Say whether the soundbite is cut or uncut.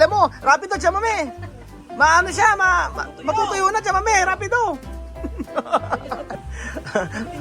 cut